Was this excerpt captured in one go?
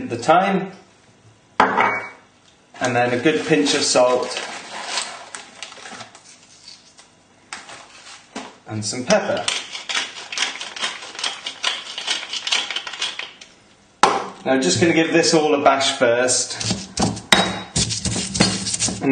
no; 1 cut; at 14.3 s

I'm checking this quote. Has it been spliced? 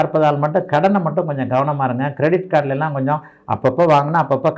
no; 0 cuts

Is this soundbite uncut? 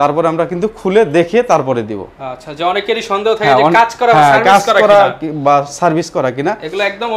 yes; 0 cuts

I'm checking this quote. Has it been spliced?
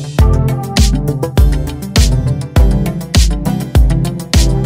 no; 0 cuts

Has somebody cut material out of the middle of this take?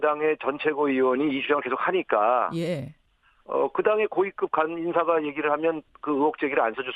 yes; 1 cut; at 4.8 s

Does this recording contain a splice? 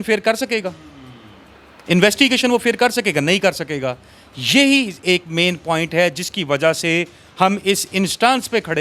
no; 0 cuts

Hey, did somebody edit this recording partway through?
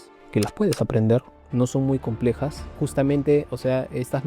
yes; 1 cut; at 2.7 s

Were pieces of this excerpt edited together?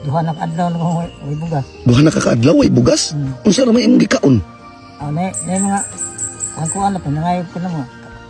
no; 0 cuts

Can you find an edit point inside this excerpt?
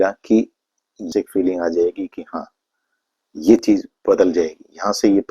yes; 1 cut; at 1.1 s

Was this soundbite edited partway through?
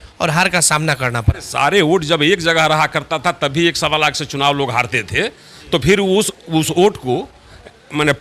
no; 0 cuts

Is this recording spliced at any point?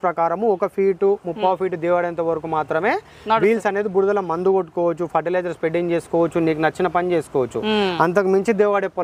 no; 0 cuts

